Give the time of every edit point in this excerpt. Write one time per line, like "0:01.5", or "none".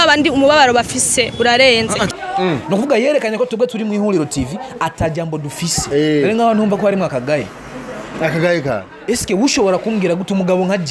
0:02.2
0:05.8